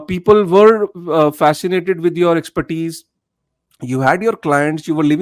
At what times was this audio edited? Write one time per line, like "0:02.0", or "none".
none